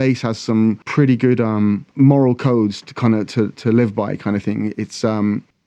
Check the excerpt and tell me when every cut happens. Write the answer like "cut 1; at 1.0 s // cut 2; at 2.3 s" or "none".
cut 1; at 0.8 s // cut 2; at 1.9 s